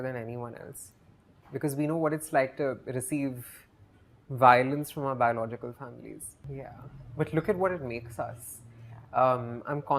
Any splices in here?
no; 0 cuts

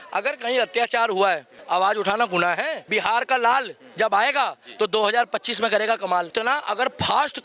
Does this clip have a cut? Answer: yes; 3 cuts; at 1.5 s, 2.8 s, 6.3 s

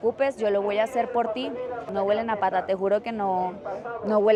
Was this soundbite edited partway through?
no; 0 cuts

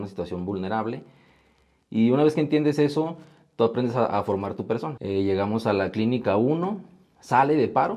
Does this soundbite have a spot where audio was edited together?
yes; 1 cut; at 4.9 s

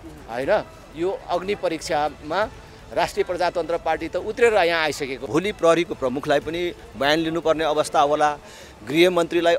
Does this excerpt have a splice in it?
yes; 1 cut; at 5.1 s

